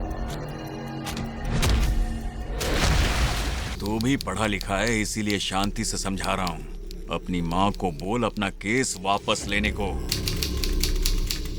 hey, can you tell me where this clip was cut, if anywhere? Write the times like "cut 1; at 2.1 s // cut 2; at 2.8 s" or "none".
cut 1; at 3.7 s